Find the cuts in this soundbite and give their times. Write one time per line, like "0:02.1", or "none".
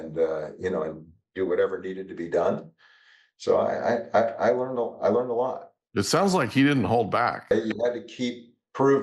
0:07.5